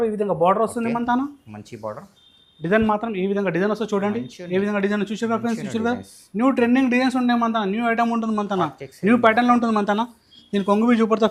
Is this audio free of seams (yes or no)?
yes